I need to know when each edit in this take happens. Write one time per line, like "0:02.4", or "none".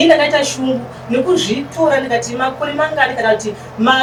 none

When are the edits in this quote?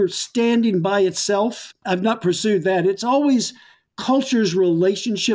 none

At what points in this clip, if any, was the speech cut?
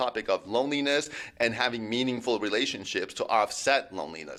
none

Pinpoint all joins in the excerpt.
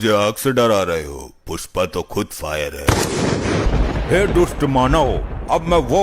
0:03.7

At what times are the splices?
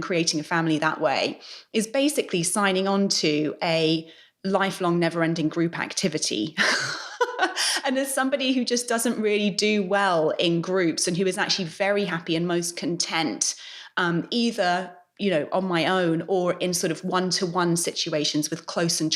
none

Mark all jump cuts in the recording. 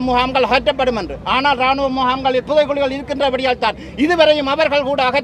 none

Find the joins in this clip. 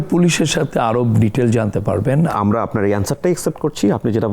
0:02.3

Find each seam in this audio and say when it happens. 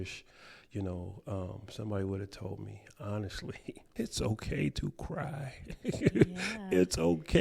0:03.8

